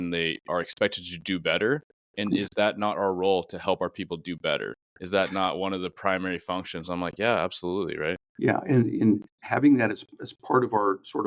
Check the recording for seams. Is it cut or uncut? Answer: uncut